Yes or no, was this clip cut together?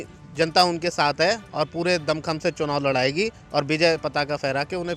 no